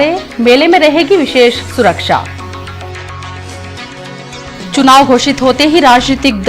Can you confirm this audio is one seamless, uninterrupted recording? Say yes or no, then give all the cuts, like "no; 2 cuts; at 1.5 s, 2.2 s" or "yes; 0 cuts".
no; 1 cut; at 4.8 s